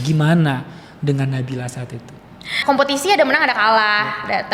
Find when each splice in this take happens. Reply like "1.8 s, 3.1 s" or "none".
2.5 s